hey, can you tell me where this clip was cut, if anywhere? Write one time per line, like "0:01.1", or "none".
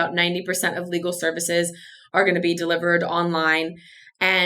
none